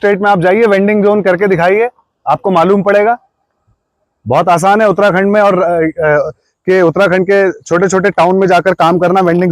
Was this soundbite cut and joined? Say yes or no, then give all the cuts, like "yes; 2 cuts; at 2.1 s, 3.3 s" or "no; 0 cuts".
no; 0 cuts